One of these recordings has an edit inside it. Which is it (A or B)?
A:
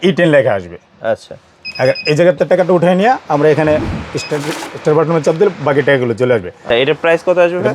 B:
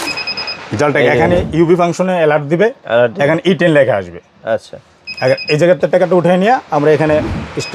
A